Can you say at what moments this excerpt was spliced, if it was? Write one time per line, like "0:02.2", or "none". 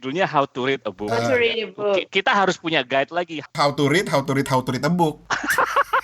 0:03.5